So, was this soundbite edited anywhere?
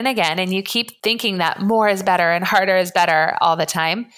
yes; 1 cut; at 0.9 s

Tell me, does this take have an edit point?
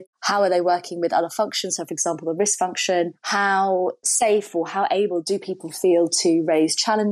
no; 0 cuts

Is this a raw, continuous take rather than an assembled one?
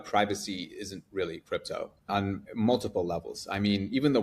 no; 1 cut; at 2.1 s

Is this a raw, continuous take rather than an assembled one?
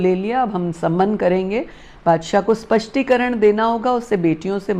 yes; 0 cuts

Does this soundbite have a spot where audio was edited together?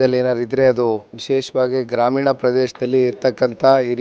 yes; 1 cut; at 1.1 s

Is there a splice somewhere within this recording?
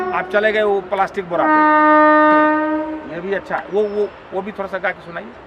no; 0 cuts

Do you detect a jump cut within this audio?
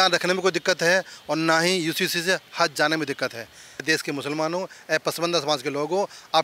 yes; 1 cut; at 3.7 s

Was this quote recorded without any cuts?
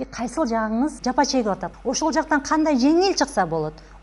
no; 2 cuts; at 1.0 s, 1.7 s

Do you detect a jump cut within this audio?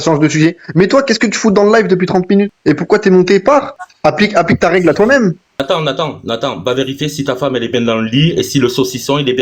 yes; 3 cuts; at 2.5 s, 3.8 s, 5.6 s

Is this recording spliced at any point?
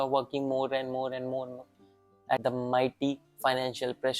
yes; 1 cut; at 2.4 s

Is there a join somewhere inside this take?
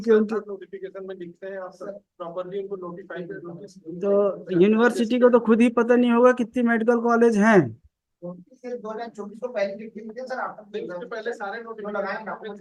no; 0 cuts

